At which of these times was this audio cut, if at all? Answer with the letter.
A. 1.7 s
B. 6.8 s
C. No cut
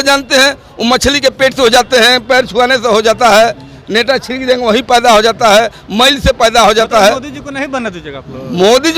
C